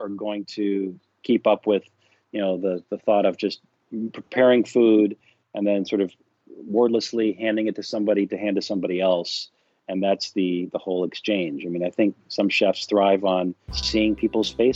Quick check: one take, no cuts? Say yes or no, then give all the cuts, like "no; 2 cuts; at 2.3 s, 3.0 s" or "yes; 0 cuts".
no; 1 cut; at 13.8 s